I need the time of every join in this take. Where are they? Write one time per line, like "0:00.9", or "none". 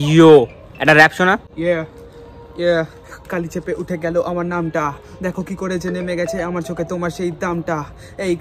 0:01.5